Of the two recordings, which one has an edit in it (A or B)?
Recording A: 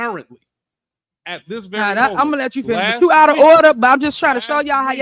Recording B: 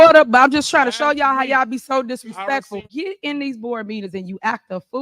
B